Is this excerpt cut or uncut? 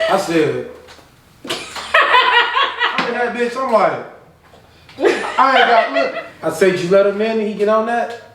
cut